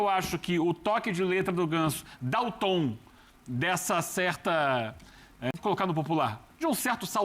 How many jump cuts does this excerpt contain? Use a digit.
1